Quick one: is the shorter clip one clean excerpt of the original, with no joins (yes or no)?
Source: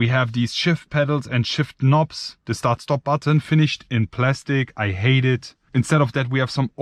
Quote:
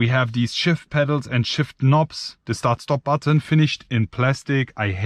yes